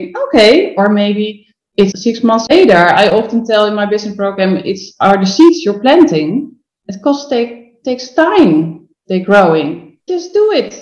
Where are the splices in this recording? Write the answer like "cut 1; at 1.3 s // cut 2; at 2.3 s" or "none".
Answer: cut 1; at 9.9 s